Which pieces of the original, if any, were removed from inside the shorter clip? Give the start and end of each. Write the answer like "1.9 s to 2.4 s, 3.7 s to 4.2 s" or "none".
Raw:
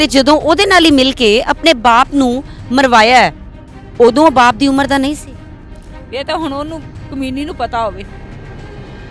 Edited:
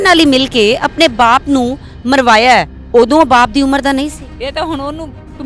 3.4 s to 3.8 s, 5.3 s to 6.0 s